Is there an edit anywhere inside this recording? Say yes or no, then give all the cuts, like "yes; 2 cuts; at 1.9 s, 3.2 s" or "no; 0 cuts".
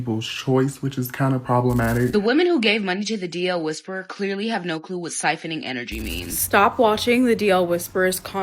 yes; 2 cuts; at 2.2 s, 6.4 s